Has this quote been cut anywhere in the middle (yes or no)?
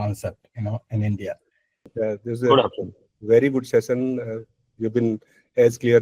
yes